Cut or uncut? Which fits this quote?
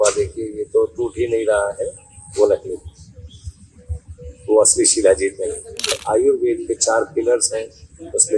cut